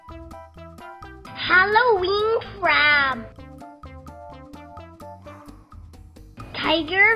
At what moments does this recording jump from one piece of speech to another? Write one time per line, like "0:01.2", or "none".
0:01.4
0:03.4
0:06.2